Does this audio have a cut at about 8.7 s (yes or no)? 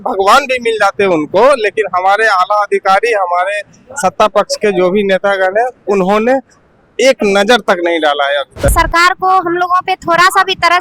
yes